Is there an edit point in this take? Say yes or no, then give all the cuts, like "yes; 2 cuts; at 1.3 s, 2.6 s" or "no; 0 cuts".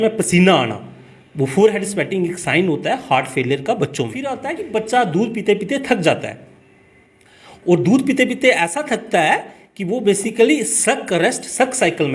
yes; 1 cut; at 4.5 s